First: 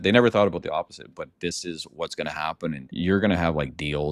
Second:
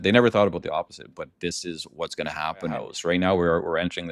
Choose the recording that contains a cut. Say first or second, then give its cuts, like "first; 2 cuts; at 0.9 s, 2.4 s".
second; 1 cut; at 2.9 s